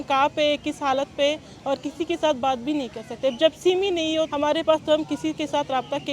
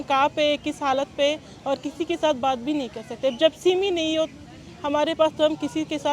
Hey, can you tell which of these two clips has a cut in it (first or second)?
first